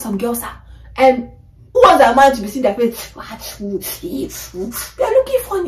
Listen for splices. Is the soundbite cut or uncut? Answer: uncut